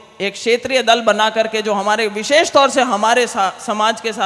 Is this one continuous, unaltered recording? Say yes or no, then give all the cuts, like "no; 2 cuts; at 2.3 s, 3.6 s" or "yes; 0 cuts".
yes; 0 cuts